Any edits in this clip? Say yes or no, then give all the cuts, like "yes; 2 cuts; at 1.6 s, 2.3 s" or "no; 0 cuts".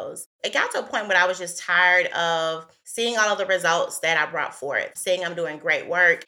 yes; 1 cut; at 4.9 s